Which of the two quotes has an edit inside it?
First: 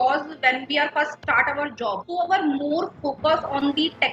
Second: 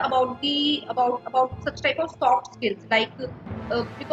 first; 2 cuts; at 1.1 s, 2.0 s

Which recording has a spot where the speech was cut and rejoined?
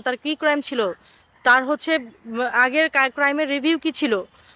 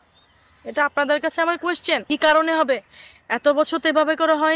second; 1 cut; at 2.0 s

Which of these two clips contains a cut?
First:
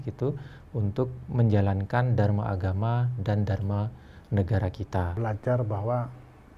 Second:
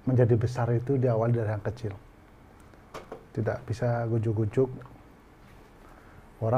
first; 1 cut; at 5.1 s

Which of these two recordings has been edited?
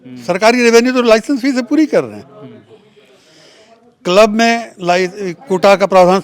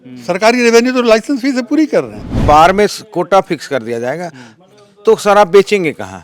second; 1 cut; at 2.4 s

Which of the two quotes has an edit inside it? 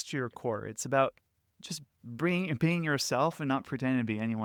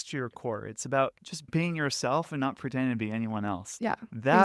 second; 1 cut; at 1.5 s

